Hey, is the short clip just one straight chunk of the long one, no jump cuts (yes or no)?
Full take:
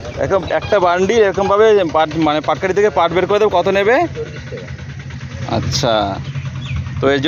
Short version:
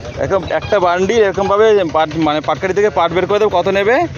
yes